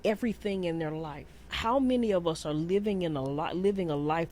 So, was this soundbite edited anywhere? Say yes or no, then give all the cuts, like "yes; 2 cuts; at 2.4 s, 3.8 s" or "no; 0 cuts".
yes; 1 cut; at 1.5 s